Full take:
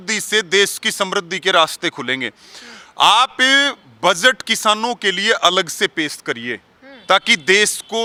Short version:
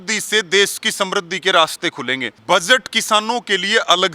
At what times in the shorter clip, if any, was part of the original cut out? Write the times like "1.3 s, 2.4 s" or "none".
2.3 s